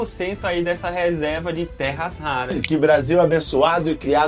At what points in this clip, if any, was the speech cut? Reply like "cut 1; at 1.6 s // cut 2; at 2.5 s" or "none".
cut 1; at 2.6 s